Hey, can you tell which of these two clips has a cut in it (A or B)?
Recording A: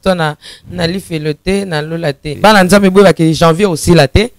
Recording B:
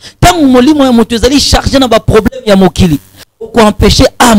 A